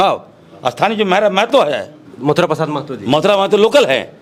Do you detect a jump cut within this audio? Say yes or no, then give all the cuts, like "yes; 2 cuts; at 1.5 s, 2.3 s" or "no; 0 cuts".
no; 0 cuts